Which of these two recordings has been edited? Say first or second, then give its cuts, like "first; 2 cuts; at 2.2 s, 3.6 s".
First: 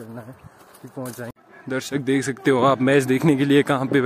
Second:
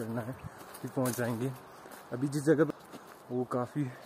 first; 1 cut; at 1.3 s